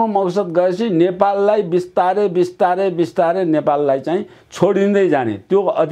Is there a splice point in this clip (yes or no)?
no